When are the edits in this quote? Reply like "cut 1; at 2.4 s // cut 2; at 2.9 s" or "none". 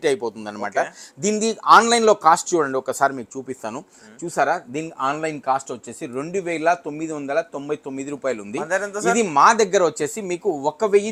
none

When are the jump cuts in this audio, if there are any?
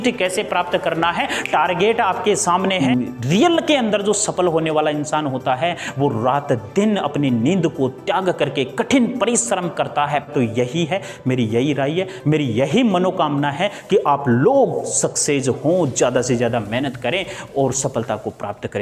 cut 1; at 2.8 s // cut 2; at 10.3 s

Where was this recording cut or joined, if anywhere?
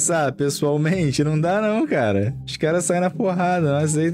none

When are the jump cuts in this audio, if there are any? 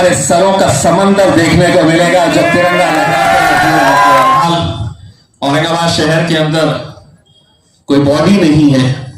cut 1; at 4.4 s

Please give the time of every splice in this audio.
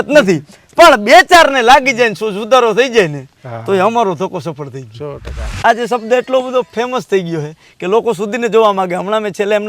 cut 1; at 5.6 s

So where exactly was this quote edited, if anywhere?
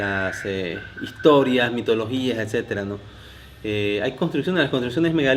cut 1; at 2.7 s

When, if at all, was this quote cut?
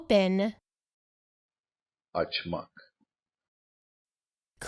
none

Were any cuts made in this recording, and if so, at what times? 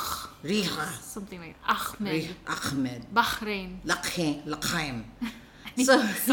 none

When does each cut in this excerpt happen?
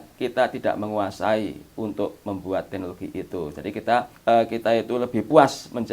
cut 1; at 4.1 s

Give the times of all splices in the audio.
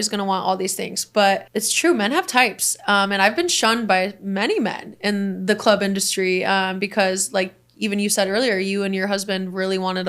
cut 1; at 1.5 s

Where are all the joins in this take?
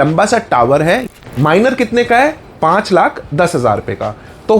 cut 1; at 1.1 s

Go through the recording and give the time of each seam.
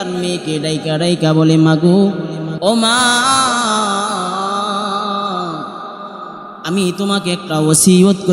cut 1; at 2.5 s

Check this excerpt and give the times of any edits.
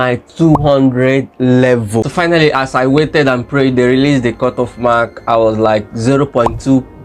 cut 1; at 2.1 s

